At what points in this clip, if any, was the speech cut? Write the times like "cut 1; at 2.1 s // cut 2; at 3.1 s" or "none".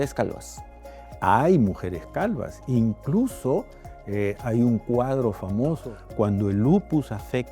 cut 1; at 5.9 s